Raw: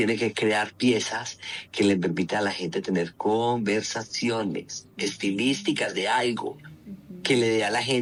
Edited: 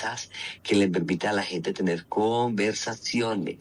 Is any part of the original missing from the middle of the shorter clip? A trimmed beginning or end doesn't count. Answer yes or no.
no